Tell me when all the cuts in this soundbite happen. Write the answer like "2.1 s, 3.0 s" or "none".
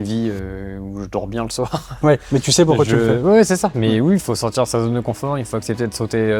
none

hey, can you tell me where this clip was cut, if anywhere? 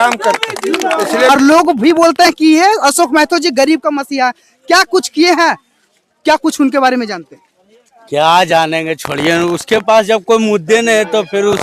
1.3 s

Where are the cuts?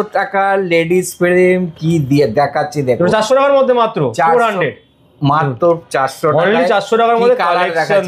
none

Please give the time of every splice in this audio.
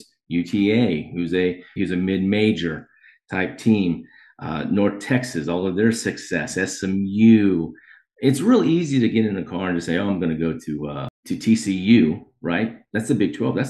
1.8 s, 11.1 s

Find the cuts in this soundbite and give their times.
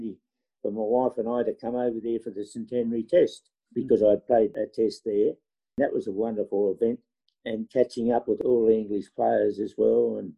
4.7 s, 5.7 s, 8.4 s

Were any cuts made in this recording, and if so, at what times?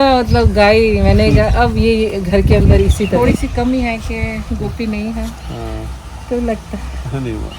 3.2 s

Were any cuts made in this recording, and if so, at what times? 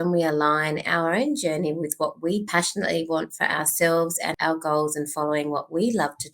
2.5 s, 4.3 s

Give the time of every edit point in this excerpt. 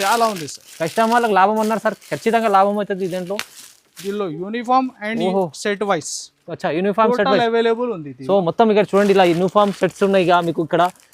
none

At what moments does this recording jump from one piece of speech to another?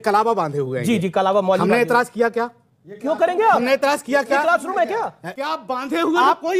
5.3 s

